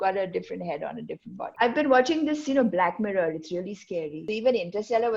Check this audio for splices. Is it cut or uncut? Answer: cut